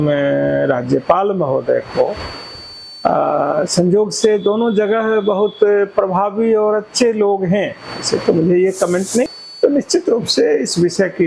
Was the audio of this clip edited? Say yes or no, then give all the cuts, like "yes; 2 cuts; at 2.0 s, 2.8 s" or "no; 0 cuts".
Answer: yes; 1 cut; at 9.3 s